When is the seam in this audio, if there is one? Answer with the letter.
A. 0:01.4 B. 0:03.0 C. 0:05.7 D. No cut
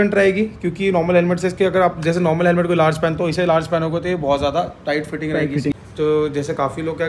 C